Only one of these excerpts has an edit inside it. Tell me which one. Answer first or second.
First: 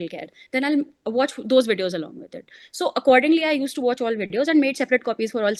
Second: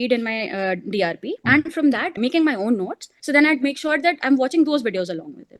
second